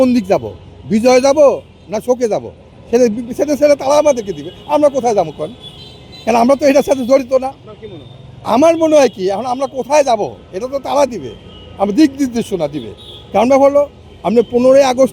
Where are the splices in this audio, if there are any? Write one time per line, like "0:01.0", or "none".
none